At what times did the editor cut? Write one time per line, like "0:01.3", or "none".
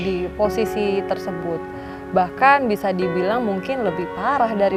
none